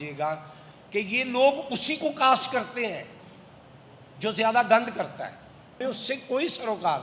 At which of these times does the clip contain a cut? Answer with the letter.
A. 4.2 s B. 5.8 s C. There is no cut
B